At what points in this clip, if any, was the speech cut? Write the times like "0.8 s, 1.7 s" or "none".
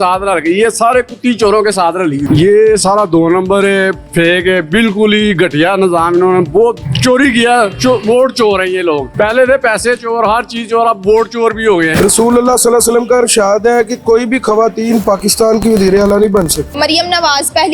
2.2 s, 11.9 s, 16.7 s